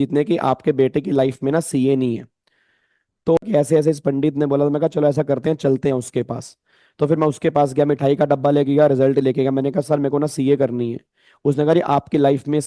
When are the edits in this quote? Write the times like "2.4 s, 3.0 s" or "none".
3.4 s